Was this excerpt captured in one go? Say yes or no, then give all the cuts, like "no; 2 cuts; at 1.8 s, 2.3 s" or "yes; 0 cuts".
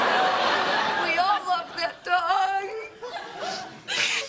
no; 1 cut; at 2.0 s